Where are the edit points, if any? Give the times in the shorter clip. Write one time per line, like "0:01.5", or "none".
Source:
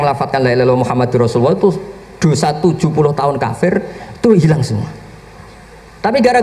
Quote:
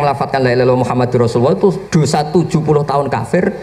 0:01.8